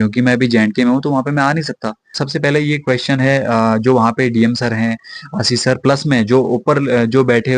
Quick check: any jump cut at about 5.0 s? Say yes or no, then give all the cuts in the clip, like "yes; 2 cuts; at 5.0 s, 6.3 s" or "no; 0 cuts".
no; 1 cut; at 2.2 s